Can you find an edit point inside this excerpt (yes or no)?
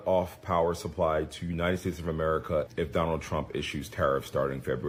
no